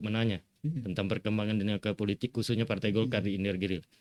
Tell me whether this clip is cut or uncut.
uncut